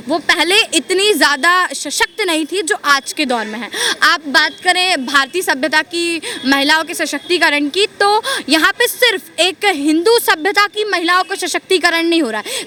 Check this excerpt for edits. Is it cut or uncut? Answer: uncut